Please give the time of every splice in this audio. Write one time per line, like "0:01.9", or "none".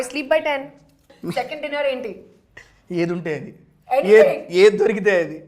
0:01.1